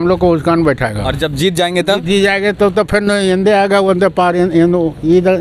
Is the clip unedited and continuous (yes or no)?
yes